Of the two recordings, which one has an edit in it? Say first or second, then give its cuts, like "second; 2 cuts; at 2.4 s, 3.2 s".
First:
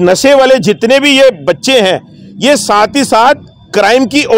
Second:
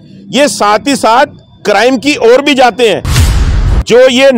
second; 1 cut; at 3.4 s